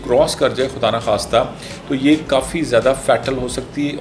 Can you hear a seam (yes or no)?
no